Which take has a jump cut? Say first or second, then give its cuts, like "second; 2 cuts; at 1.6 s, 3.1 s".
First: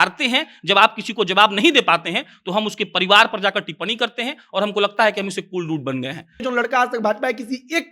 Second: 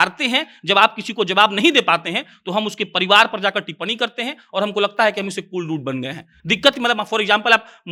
first; 1 cut; at 6.4 s